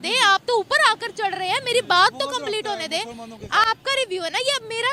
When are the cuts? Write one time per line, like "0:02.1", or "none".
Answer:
none